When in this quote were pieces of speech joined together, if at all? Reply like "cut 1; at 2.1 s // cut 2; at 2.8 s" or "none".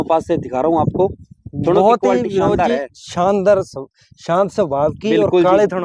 none

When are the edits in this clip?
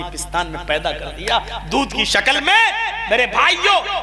none

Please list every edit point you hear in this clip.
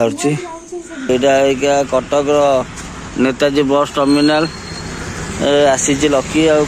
cut 1; at 1.1 s

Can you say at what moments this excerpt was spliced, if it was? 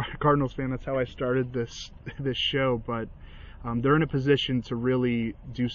none

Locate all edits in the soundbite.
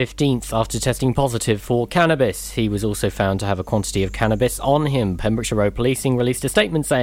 cut 1; at 3.3 s

